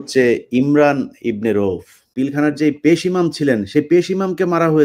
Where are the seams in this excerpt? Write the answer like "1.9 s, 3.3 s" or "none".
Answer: 2.1 s